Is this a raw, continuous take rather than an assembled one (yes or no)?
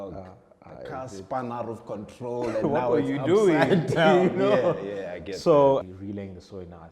no